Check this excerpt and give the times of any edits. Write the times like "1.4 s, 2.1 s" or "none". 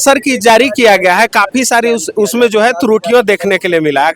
none